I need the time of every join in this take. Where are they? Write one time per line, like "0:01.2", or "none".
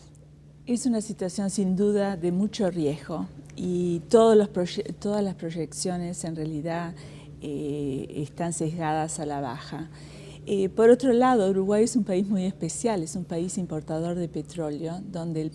none